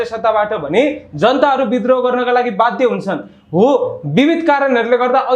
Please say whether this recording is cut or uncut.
uncut